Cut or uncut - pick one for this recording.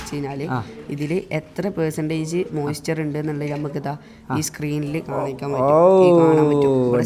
uncut